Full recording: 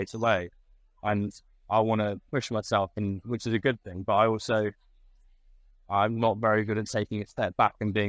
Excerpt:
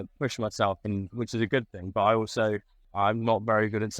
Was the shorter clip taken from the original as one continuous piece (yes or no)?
no